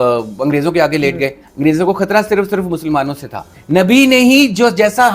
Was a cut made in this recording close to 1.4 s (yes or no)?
yes